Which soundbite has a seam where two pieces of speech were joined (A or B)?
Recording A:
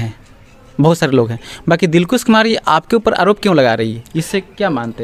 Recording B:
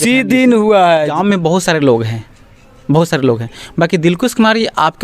B